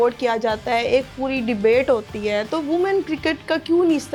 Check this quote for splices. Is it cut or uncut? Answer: uncut